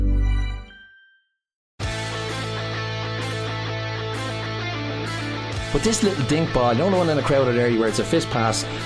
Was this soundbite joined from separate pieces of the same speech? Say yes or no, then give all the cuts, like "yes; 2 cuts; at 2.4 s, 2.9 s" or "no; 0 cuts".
yes; 1 cut; at 1.6 s